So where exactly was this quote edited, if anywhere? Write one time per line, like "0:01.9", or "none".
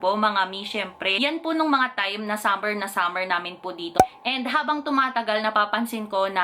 0:01.1
0:03.9